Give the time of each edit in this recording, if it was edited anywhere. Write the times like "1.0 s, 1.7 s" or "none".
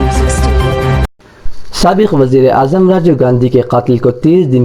1.2 s